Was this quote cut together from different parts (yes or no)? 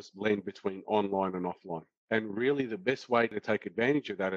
no